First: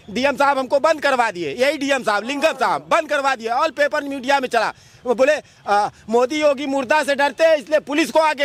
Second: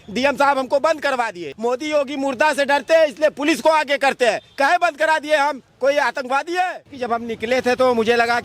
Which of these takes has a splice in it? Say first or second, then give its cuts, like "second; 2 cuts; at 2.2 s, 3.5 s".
second; 2 cuts; at 1.5 s, 6.9 s